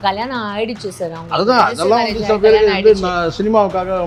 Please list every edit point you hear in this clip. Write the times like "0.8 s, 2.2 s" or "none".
none